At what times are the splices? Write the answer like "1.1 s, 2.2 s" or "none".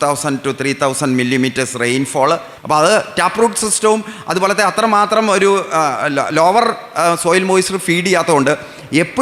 2.5 s